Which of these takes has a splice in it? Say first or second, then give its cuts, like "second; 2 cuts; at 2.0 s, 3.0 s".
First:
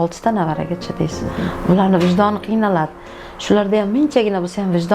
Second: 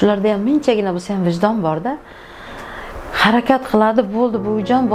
first; 1 cut; at 1.5 s